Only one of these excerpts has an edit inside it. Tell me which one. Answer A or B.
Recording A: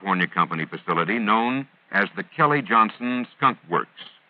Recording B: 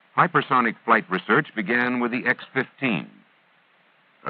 B